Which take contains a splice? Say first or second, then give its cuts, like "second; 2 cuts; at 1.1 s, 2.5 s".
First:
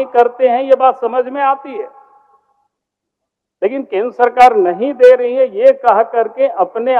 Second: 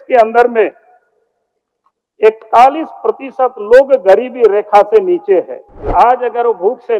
second; 1 cut; at 5.9 s